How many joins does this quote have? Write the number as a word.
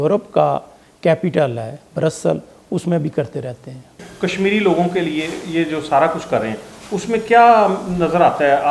one